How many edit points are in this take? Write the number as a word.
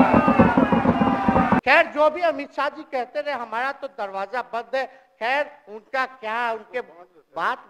one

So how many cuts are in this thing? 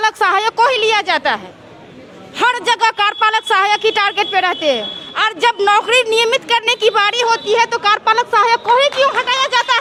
zero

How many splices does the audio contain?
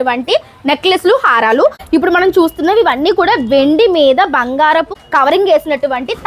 two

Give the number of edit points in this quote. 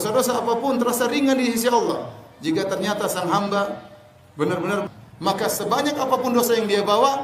one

